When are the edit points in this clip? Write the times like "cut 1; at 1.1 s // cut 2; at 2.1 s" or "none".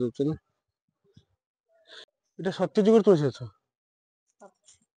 cut 1; at 2.0 s